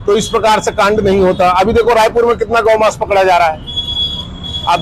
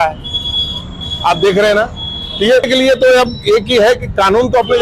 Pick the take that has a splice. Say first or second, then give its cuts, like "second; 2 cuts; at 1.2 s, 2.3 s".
second; 1 cut; at 2.7 s